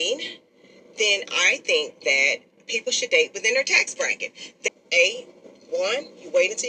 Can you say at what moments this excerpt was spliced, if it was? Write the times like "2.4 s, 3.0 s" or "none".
4.7 s